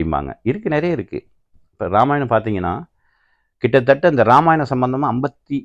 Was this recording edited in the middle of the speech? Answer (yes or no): no